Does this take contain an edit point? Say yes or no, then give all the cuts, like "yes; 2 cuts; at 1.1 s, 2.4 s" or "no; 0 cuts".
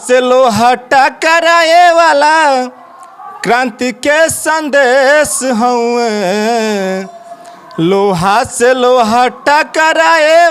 no; 0 cuts